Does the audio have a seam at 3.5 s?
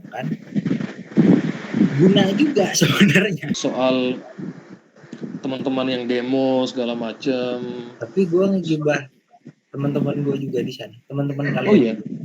yes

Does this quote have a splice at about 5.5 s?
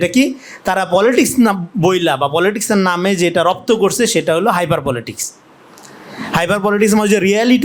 no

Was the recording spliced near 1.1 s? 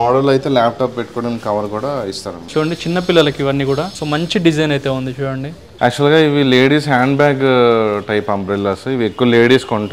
no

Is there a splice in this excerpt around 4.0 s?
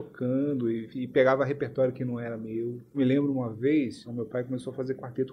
yes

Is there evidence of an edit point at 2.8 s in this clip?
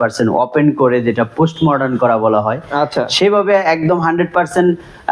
no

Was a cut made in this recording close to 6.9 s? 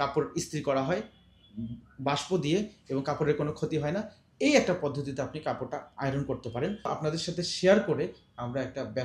yes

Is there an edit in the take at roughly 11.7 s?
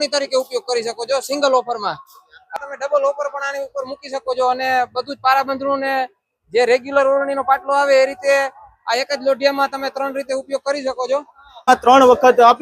yes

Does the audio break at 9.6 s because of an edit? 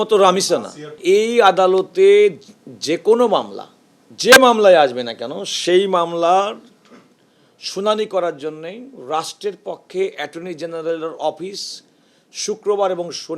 no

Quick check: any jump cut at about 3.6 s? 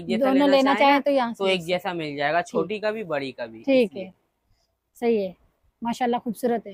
no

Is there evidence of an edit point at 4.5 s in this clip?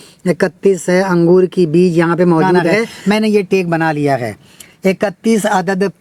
no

